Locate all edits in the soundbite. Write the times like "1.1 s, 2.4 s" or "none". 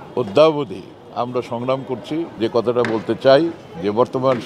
2.3 s